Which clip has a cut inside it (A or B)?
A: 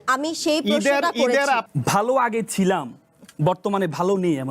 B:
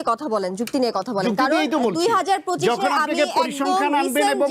A